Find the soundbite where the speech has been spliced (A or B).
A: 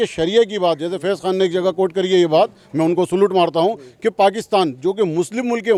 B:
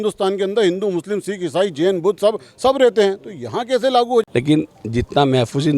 B